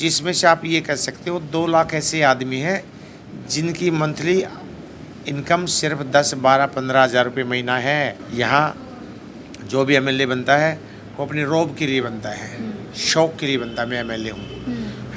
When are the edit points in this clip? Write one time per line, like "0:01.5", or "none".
0:08.2